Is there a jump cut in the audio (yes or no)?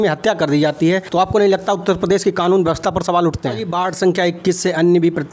yes